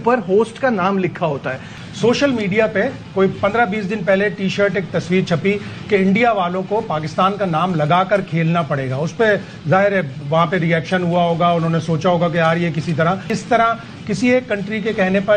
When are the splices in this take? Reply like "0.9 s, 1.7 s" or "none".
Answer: none